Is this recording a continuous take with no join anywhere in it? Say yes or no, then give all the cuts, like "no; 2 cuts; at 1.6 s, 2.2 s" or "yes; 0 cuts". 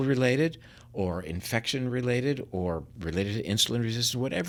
yes; 0 cuts